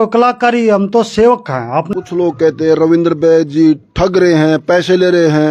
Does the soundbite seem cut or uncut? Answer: cut